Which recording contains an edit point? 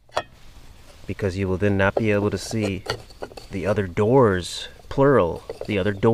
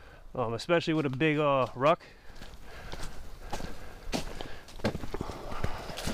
second; 1 cut; at 4.6 s

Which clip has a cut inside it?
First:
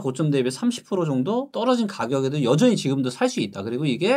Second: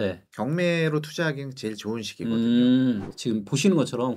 second; 1 cut; at 3.1 s

